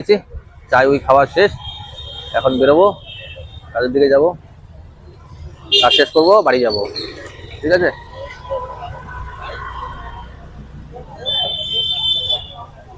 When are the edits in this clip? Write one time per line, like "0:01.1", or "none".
none